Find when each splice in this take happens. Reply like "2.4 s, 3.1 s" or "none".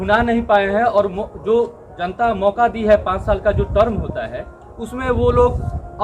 none